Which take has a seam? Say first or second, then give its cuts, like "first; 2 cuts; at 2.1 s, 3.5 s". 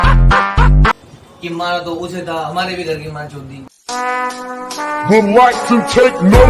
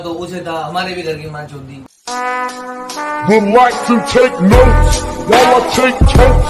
first; 1 cut; at 0.9 s